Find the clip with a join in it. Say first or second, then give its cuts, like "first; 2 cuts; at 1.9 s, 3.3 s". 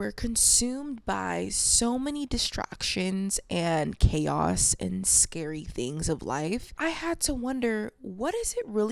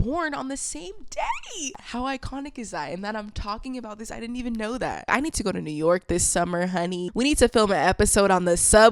second; 3 cuts; at 1.8 s, 5.1 s, 7.0 s